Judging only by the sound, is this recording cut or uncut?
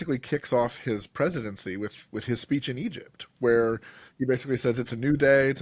uncut